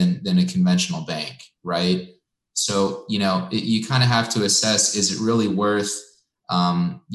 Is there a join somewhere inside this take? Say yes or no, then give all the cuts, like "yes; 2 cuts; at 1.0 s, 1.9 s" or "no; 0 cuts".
no; 0 cuts